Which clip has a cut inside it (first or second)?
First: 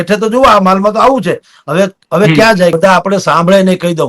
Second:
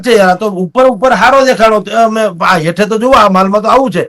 first